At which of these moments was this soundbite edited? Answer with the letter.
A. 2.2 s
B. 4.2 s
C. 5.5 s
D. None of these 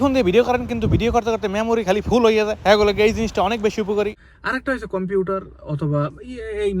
B